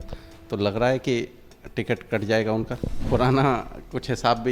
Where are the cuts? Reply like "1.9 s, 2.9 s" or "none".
2.9 s